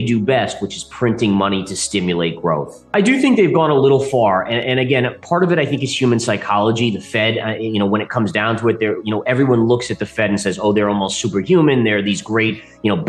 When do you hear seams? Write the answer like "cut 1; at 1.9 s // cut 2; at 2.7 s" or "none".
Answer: none